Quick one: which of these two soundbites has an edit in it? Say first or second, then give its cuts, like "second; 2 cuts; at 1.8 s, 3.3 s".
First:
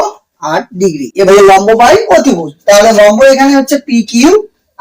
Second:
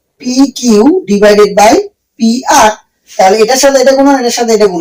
first; 1 cut; at 1.3 s